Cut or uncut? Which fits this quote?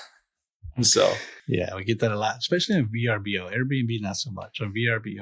cut